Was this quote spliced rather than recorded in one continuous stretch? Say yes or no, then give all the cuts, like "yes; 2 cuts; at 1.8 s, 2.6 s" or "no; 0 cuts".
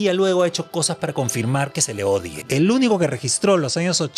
yes; 1 cut; at 2.4 s